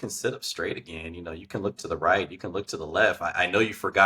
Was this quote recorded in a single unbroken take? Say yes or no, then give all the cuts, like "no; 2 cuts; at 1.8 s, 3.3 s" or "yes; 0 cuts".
yes; 0 cuts